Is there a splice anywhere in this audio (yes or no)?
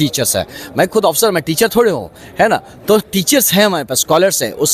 no